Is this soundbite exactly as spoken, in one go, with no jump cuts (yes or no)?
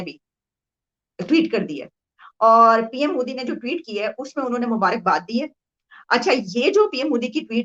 yes